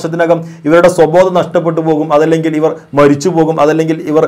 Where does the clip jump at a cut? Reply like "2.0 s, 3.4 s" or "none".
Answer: none